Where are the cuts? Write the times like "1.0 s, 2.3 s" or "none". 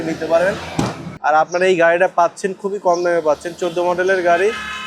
1.0 s